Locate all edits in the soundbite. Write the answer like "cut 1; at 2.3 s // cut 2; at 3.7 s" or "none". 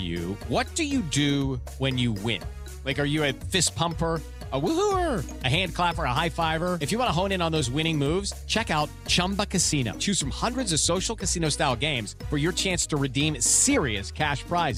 none